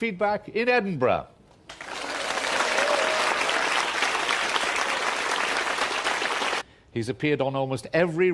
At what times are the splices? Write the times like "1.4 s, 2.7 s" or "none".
none